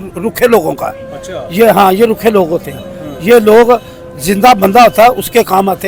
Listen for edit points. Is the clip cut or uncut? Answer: uncut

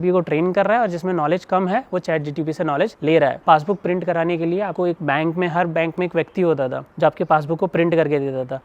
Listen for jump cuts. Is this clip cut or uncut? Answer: cut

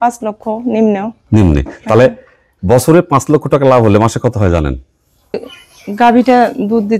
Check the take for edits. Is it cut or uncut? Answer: cut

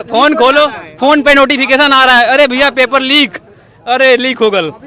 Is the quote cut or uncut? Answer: uncut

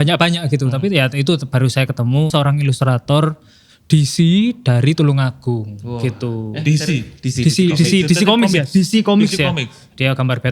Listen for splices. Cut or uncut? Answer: cut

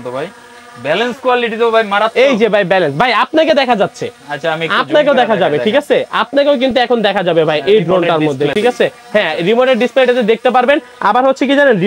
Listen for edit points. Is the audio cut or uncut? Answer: uncut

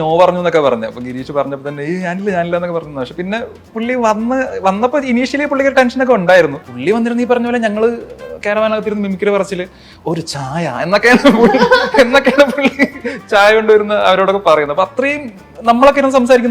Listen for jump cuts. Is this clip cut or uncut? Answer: cut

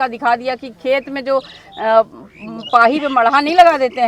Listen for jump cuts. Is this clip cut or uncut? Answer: uncut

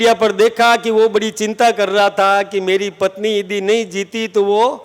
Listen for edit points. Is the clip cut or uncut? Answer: uncut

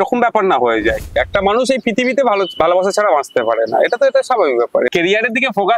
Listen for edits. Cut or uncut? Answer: cut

